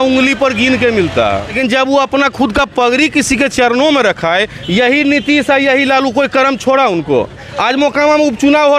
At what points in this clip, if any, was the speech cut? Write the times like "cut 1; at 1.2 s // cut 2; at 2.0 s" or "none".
cut 1; at 1.6 s // cut 2; at 7.5 s